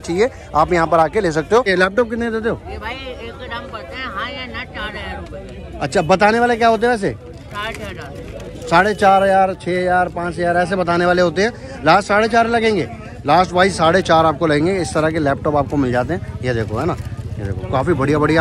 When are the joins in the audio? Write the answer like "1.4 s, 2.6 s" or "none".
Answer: none